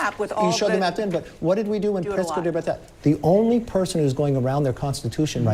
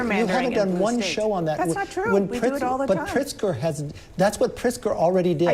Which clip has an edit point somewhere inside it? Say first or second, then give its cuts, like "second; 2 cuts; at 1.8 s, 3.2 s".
first; 1 cut; at 2.9 s